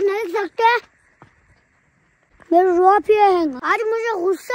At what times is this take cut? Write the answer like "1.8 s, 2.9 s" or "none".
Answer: 2.3 s, 3.6 s